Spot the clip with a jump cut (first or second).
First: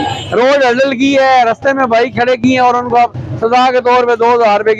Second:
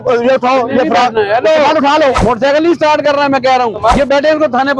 second